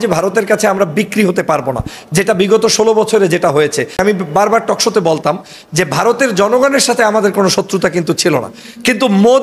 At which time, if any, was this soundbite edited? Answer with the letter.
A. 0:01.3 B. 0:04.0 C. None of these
B